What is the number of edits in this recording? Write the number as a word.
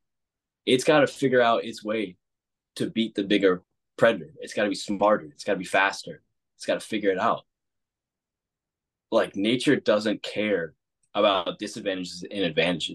zero